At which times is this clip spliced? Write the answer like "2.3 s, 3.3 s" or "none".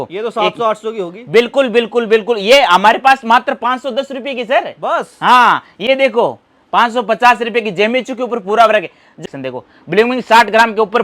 9.2 s